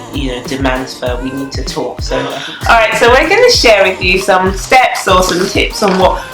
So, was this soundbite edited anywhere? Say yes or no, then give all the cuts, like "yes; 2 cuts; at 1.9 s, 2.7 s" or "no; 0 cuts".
yes; 1 cut; at 2.5 s